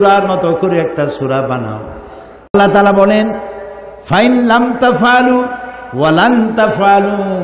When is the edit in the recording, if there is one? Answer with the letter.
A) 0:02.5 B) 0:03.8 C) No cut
A